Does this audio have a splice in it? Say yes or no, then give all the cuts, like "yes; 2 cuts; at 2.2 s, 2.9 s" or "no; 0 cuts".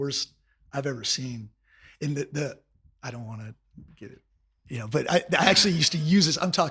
no; 0 cuts